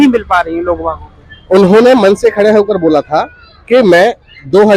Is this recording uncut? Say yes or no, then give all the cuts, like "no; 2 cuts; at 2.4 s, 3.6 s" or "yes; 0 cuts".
yes; 0 cuts